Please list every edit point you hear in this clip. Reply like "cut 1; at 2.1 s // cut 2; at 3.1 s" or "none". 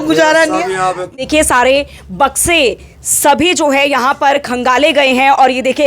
cut 1; at 1.1 s